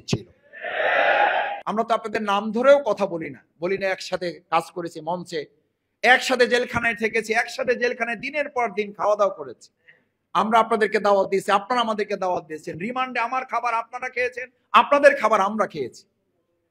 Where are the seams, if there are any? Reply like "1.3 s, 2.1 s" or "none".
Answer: 1.6 s